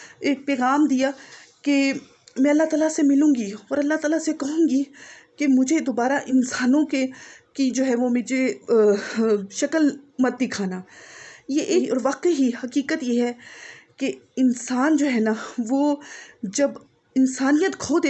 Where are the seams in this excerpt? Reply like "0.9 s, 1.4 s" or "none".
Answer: 6.3 s, 11.8 s